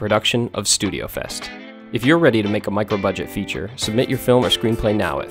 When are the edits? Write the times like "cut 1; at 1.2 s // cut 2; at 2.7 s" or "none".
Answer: none